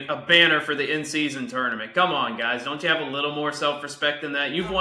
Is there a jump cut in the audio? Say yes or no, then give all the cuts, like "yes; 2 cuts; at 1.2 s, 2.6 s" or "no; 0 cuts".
no; 0 cuts